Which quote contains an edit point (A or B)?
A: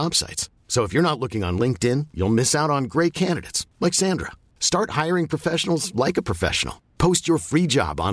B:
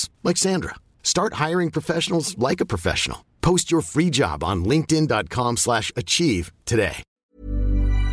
B